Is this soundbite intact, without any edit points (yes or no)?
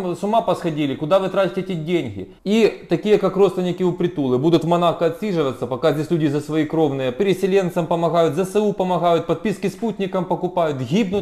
no